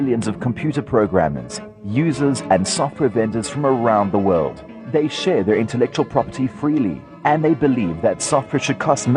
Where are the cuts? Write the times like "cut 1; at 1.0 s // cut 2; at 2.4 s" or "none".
none